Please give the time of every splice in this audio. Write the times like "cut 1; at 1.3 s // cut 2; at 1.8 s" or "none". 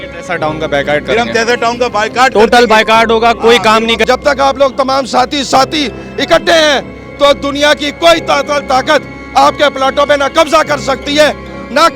cut 1; at 4.1 s